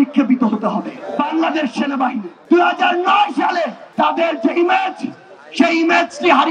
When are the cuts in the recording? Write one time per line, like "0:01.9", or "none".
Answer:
0:01.0
0:02.3
0:03.8